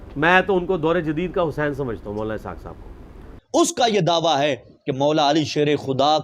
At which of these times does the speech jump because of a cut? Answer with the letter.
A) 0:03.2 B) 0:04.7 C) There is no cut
A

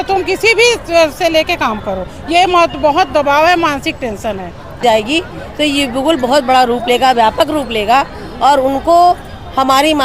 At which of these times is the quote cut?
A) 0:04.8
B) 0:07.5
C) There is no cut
A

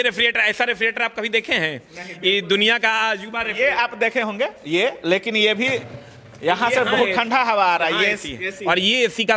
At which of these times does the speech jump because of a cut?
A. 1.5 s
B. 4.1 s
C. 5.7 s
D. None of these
D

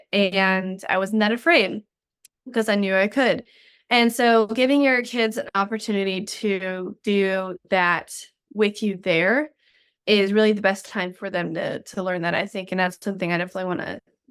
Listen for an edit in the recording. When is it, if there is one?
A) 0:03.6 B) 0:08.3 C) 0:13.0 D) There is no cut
D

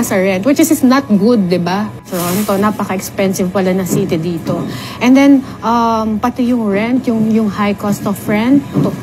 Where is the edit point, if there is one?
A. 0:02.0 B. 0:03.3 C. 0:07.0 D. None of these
A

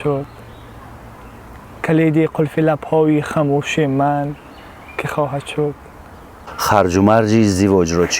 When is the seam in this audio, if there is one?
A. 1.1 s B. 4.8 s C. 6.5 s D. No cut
C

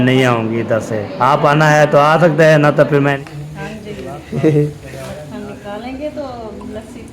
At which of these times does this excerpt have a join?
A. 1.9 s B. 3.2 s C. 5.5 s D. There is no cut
B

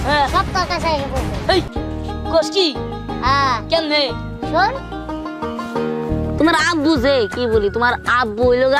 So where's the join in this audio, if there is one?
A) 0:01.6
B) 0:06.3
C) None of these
B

